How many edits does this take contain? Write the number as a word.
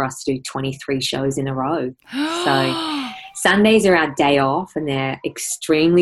zero